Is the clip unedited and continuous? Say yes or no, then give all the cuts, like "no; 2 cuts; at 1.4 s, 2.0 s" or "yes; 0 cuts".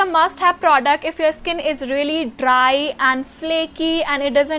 yes; 0 cuts